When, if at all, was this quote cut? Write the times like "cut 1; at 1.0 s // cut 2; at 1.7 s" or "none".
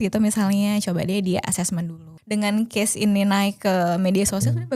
cut 1; at 2.1 s